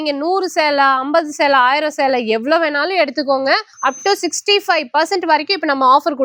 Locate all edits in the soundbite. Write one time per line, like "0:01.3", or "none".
none